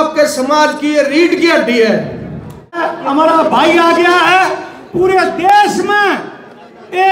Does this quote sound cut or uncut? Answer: cut